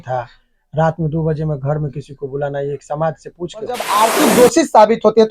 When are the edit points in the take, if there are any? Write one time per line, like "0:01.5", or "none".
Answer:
0:03.9